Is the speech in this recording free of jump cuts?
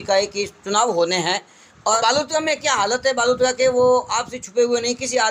no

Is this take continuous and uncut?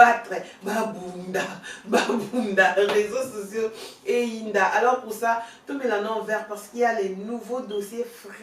yes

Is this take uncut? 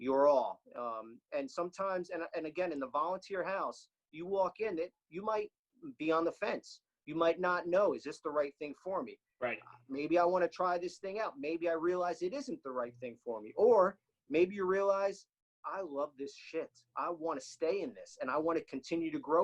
yes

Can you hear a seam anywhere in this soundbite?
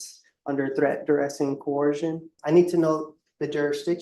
yes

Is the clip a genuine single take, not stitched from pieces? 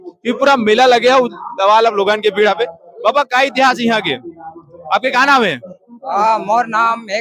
yes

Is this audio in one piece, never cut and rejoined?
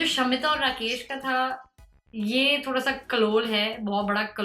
yes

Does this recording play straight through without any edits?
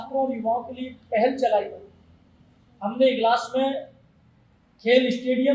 yes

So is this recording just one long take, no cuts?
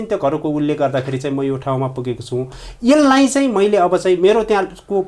yes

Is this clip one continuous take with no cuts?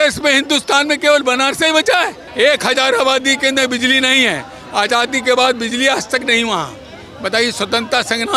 no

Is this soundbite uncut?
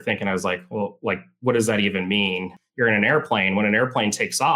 no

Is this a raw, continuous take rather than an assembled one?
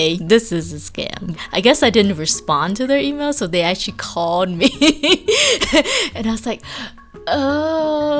no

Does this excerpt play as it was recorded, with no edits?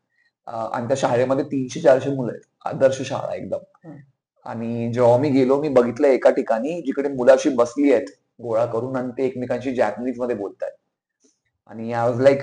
yes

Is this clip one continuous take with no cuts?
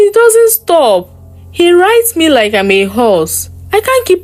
yes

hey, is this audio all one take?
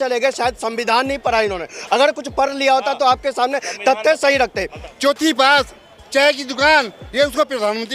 no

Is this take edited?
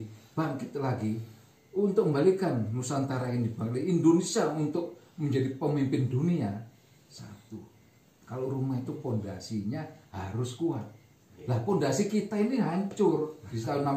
no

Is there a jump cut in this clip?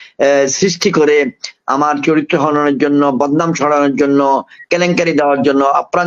no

